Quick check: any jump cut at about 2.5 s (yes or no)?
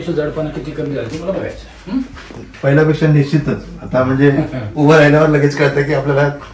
yes